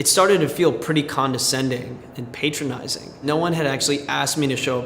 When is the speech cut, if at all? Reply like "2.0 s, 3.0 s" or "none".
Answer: 3.2 s